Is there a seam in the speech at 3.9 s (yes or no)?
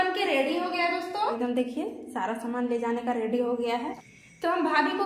yes